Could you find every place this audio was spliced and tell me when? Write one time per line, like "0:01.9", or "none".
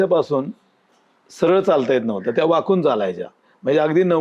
none